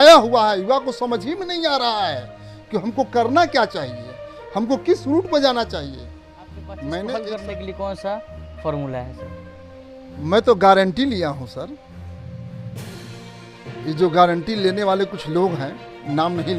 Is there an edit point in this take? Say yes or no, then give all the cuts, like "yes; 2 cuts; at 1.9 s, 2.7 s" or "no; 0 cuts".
yes; 1 cut; at 7.3 s